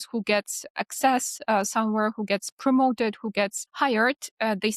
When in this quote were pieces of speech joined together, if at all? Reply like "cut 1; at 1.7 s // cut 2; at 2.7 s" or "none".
cut 1; at 3.6 s